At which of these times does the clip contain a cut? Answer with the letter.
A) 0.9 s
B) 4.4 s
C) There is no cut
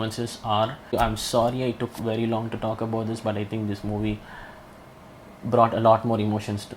A